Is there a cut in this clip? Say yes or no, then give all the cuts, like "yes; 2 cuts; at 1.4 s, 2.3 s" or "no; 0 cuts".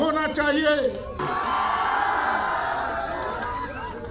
yes; 1 cut; at 1.2 s